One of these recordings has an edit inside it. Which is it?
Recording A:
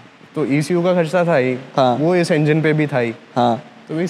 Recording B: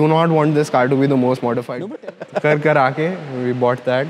B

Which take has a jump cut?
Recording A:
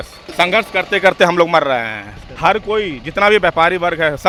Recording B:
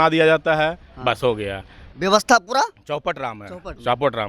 B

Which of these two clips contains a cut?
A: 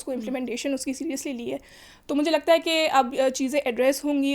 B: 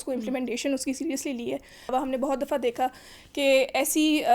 B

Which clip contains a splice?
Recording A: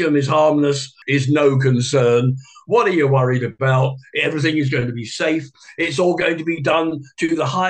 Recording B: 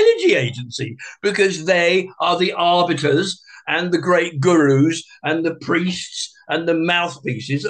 A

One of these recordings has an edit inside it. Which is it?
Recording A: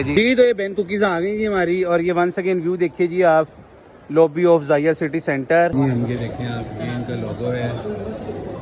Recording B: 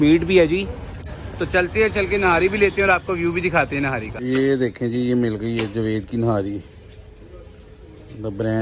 A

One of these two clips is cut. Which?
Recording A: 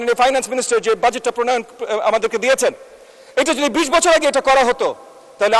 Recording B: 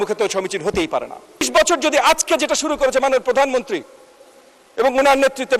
B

